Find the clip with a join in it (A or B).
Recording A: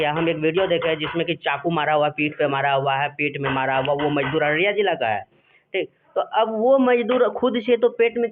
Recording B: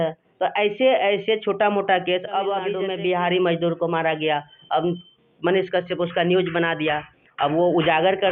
B